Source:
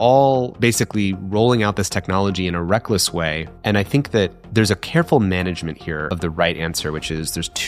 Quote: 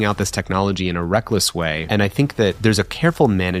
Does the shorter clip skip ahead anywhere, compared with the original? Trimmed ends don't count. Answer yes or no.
yes